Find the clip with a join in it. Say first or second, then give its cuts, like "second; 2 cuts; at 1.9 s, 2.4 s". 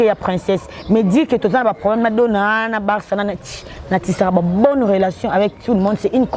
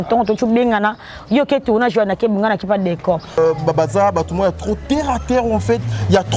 second; 1 cut; at 3.4 s